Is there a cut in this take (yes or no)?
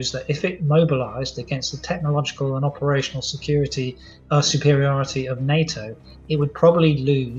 no